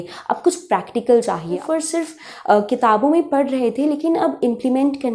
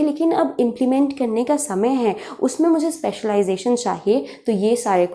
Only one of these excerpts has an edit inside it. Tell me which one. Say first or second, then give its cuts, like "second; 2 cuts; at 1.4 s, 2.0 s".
first; 1 cut; at 1.6 s